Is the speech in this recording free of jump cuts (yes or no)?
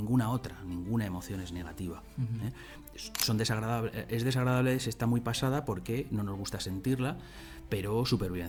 yes